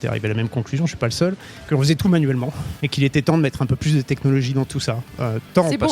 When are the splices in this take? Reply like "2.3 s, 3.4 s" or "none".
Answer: 1.5 s